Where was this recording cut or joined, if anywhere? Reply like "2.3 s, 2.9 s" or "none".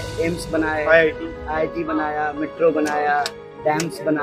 none